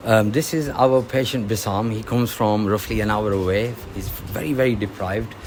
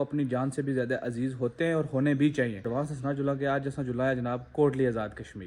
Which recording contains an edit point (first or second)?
second